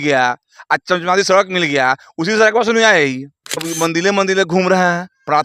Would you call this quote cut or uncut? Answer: cut